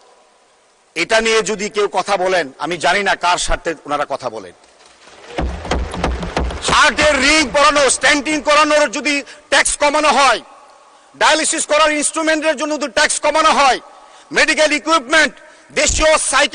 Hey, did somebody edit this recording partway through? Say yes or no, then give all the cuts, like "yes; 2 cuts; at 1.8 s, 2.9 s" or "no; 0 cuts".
no; 0 cuts